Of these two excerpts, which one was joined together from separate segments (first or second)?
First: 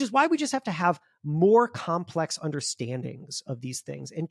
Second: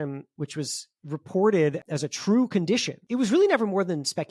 second